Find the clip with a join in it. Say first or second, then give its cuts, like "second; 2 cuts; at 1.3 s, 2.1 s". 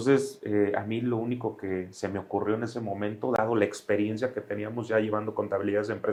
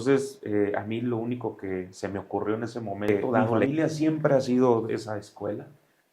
second; 1 cut; at 3.4 s